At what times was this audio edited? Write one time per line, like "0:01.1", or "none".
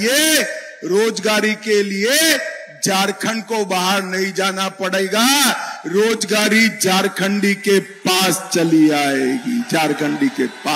none